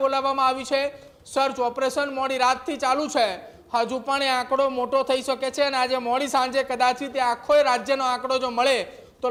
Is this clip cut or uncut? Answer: uncut